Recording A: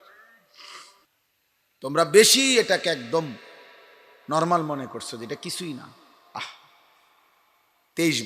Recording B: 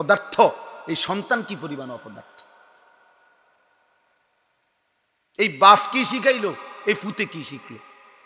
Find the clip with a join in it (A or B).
A